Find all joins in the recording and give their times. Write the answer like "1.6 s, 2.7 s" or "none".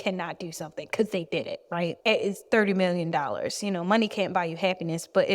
2.0 s